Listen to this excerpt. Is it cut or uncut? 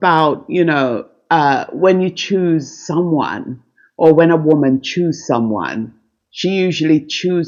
uncut